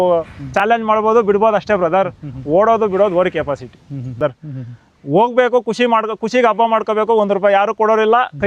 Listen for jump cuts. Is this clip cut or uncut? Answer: cut